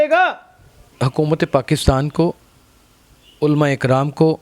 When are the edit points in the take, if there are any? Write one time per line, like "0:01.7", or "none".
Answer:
0:00.9